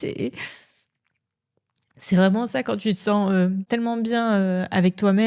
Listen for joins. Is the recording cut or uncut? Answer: cut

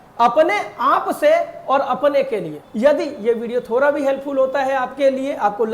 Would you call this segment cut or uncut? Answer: cut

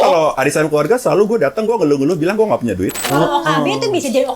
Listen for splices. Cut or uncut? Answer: cut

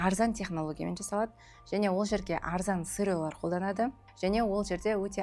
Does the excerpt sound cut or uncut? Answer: cut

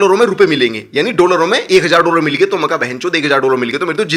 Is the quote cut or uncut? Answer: uncut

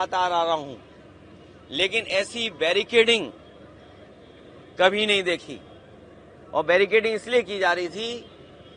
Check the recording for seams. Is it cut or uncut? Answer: uncut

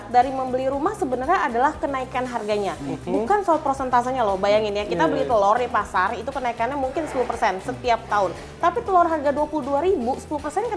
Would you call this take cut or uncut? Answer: uncut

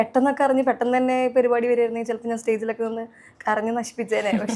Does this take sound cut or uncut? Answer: uncut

